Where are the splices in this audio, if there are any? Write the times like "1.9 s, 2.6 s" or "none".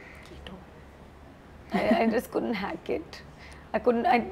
none